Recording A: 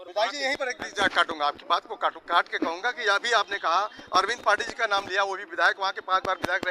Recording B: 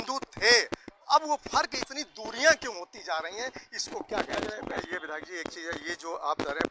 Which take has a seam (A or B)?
B